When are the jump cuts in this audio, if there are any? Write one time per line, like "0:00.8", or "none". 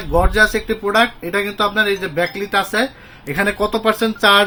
none